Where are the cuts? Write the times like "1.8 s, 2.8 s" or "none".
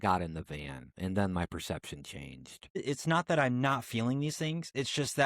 2.8 s